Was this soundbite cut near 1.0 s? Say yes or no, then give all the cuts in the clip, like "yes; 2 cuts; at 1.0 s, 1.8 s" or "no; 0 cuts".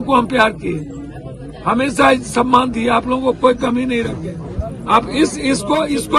no; 0 cuts